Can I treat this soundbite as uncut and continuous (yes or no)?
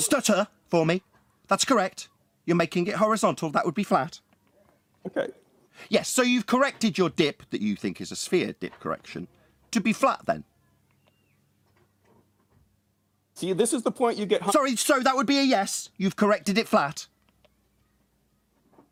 yes